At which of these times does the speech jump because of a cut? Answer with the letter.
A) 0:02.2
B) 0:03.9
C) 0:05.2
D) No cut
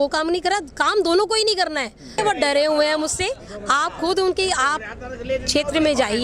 A